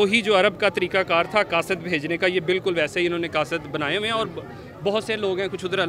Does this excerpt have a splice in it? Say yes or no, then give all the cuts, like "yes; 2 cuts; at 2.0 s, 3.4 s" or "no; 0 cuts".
no; 0 cuts